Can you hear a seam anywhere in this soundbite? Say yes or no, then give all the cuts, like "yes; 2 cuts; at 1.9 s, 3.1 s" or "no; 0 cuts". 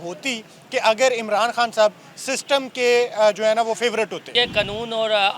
yes; 1 cut; at 4.3 s